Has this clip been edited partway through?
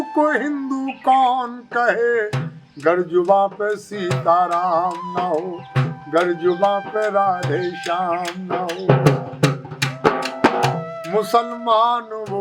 no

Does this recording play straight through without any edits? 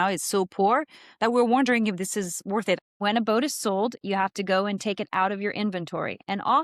no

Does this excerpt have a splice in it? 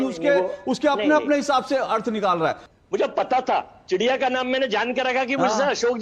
yes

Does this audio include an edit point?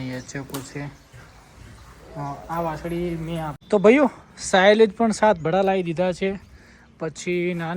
yes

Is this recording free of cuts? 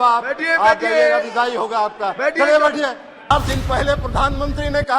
no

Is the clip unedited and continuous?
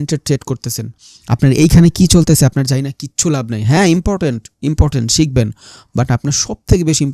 yes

